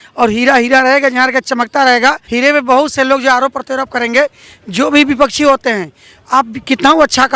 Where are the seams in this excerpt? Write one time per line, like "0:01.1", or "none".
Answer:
0:02.2